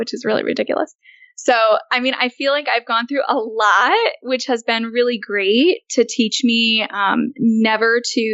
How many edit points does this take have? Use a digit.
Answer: 0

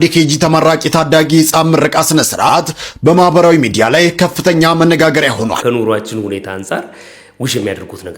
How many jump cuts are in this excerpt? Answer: 1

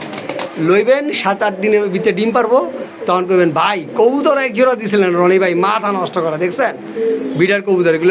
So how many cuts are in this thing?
0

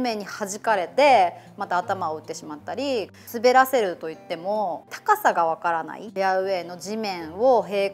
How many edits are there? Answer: 3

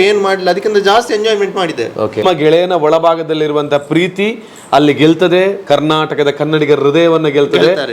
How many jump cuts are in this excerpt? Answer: 1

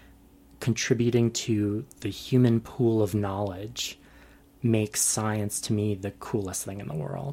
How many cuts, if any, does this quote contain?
0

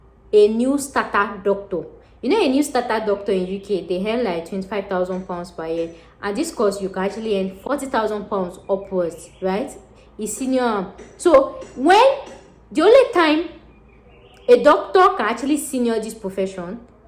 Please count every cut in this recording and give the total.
1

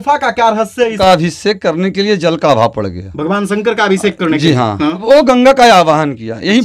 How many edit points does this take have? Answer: 2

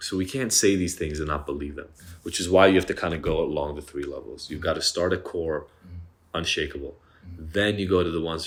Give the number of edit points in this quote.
0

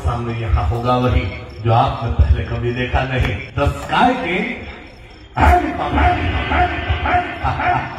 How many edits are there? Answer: 1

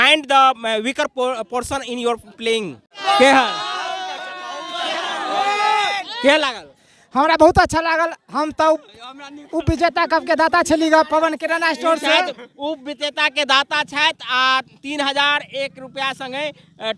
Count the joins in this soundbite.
1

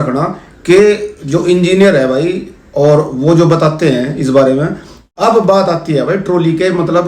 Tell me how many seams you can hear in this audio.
1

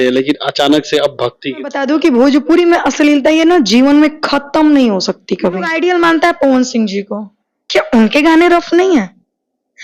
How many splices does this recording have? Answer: 2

